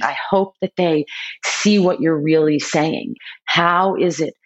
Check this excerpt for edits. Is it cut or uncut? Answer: cut